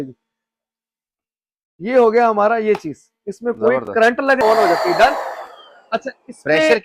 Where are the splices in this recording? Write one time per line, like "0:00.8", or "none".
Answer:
0:04.4

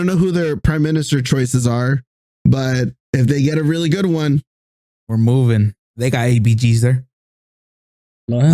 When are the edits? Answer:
0:05.7

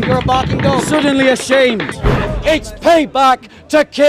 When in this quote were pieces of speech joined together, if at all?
0:02.2

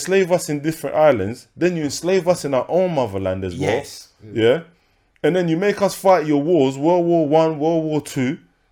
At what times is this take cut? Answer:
none

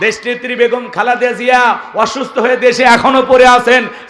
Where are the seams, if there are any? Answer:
none

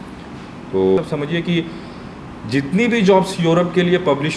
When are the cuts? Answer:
0:01.0

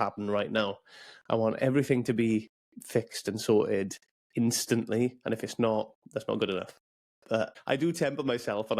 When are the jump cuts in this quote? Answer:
0:07.6

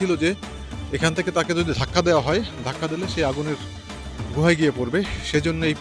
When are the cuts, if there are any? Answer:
none

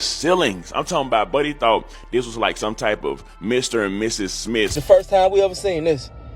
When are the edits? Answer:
0:04.8

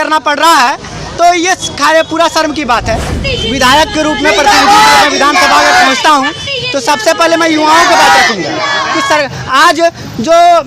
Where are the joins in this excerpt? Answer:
0:03.1

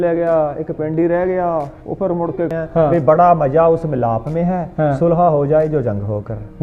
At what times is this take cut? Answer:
0:02.5

